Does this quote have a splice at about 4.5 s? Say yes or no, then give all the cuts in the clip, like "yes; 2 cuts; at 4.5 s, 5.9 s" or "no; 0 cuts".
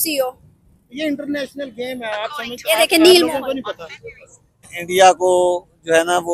yes; 1 cut; at 4.5 s